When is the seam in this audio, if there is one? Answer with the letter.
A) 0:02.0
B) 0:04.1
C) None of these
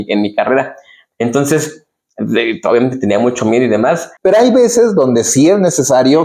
B